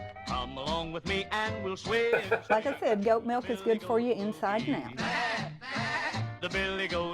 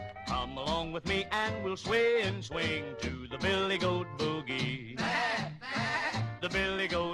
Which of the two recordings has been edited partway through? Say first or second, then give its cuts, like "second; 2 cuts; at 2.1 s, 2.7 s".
first; 2 cuts; at 2.2 s, 4.9 s